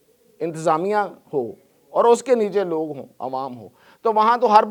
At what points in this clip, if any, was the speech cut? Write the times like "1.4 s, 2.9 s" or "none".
none